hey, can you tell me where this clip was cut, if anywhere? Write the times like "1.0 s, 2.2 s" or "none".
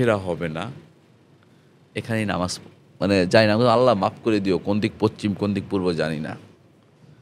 none

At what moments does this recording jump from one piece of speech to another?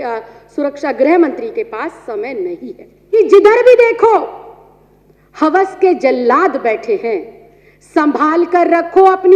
3.2 s

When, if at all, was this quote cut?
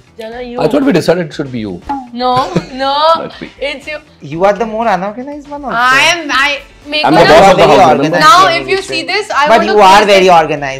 none

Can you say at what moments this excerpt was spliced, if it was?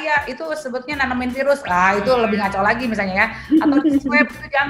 none

